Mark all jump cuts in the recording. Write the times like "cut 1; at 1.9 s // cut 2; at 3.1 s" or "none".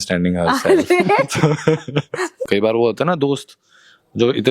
cut 1; at 2.4 s